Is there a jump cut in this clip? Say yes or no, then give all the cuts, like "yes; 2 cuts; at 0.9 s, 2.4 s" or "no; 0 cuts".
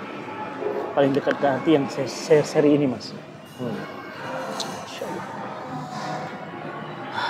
no; 0 cuts